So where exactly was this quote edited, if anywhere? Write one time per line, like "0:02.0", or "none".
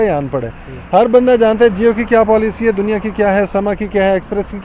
none